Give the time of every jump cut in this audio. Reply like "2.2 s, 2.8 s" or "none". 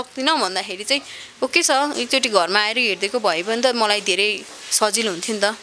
none

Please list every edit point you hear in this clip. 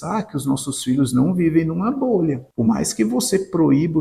2.5 s

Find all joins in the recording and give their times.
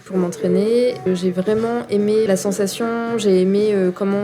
1.0 s, 2.3 s

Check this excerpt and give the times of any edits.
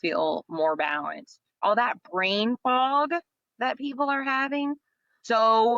1.6 s, 4.8 s

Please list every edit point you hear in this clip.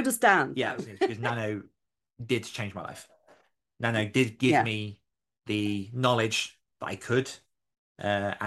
1.2 s

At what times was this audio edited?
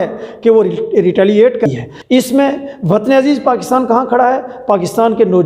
1.6 s

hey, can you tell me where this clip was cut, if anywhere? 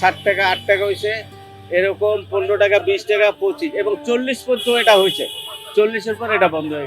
none

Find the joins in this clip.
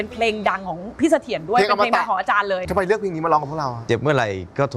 2.7 s

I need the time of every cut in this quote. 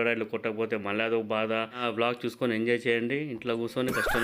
1.8 s

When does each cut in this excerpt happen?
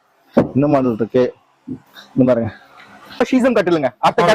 3.2 s

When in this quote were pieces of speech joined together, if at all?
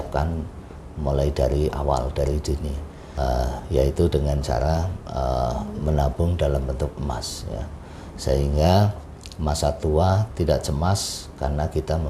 3.0 s

